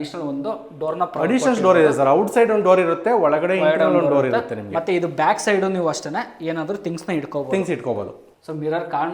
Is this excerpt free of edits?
yes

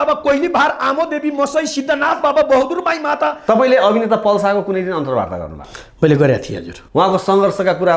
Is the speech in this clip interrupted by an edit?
yes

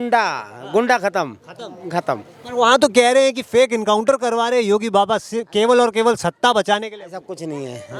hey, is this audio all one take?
yes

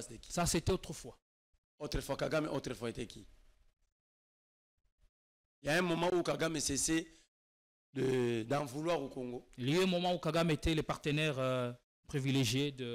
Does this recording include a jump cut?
no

